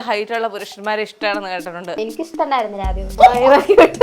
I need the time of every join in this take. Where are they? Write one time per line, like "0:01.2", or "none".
0:02.0
0:03.1